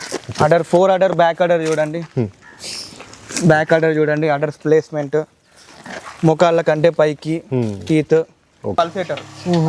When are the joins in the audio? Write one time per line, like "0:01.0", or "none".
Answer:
0:08.7